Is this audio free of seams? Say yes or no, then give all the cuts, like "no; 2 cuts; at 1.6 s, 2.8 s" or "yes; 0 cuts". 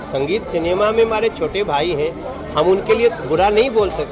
yes; 0 cuts